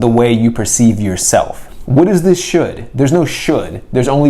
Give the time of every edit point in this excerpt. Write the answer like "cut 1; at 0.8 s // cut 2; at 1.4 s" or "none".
cut 1; at 1.6 s